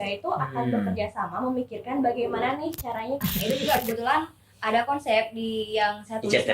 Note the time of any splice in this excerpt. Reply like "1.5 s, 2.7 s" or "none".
3.2 s